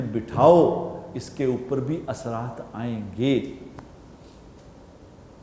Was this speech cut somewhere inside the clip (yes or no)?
no